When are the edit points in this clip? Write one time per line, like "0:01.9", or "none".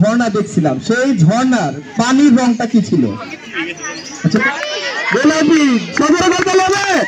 0:03.4
0:04.4